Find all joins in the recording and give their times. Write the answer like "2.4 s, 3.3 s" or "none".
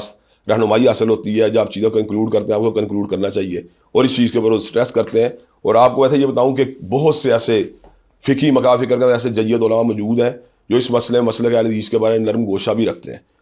none